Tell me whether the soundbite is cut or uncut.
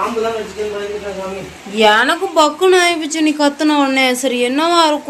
uncut